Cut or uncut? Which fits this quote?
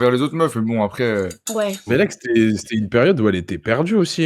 cut